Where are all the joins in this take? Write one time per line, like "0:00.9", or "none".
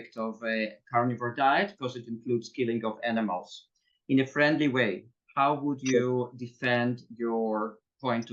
none